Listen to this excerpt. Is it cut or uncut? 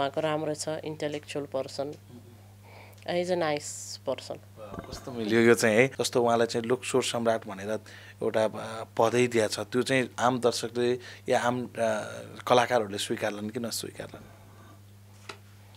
cut